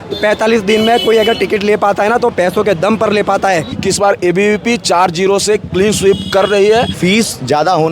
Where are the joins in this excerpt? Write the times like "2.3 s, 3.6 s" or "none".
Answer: 3.7 s, 6.9 s